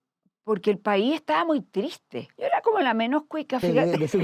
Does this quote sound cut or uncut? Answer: cut